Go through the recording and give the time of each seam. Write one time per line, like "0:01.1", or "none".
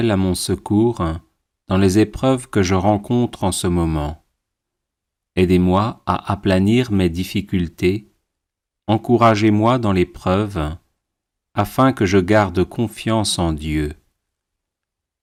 none